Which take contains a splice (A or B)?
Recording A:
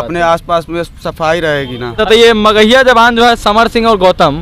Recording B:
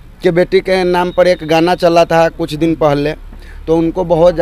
A